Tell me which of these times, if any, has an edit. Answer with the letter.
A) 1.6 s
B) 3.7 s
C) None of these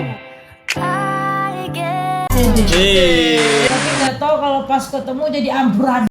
B